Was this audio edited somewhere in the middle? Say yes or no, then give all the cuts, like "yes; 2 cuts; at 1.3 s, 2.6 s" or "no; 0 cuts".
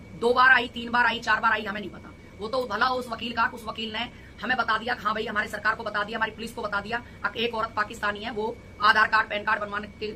no; 0 cuts